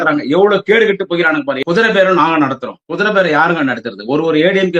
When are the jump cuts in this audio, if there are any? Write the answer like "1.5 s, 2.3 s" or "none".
1.6 s